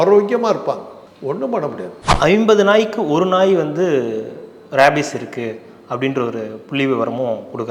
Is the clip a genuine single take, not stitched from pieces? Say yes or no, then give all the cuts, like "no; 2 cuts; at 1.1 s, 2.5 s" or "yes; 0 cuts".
no; 1 cut; at 2.0 s